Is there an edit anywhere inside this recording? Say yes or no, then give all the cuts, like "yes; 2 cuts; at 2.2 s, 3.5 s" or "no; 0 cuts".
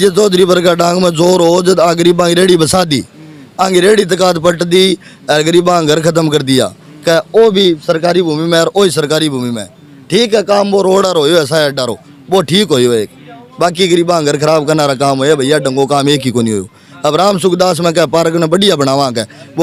no; 0 cuts